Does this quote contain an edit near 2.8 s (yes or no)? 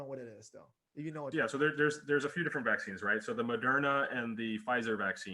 no